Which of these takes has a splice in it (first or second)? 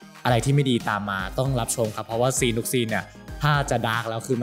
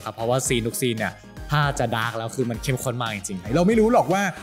second